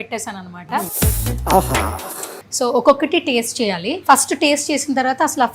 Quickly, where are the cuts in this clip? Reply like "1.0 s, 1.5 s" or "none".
0.9 s, 2.4 s, 3.9 s

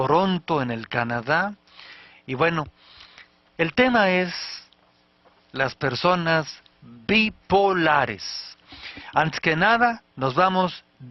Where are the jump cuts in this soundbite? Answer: none

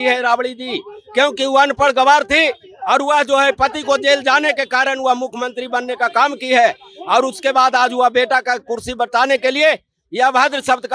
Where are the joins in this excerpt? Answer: none

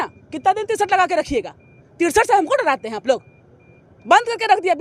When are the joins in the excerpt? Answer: none

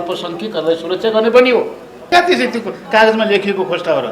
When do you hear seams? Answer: 2.1 s

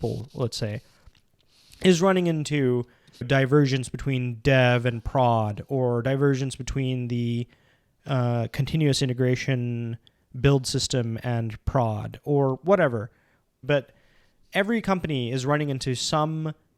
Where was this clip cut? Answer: 3.2 s, 13.6 s

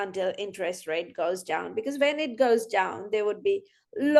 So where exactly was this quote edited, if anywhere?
none

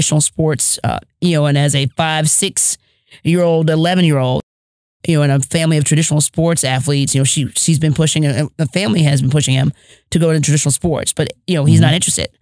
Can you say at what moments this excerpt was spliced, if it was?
none

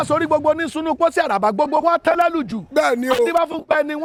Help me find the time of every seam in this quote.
none

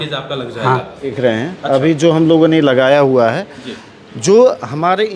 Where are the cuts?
1.1 s

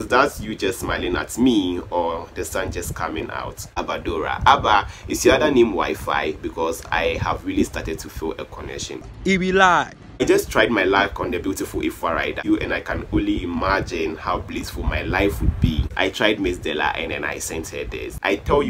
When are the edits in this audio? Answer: 3.8 s, 10.2 s, 12.4 s, 15.9 s

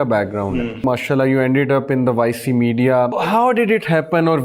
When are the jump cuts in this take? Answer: 0.8 s, 3.2 s

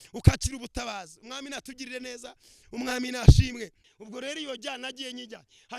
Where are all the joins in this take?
3.9 s

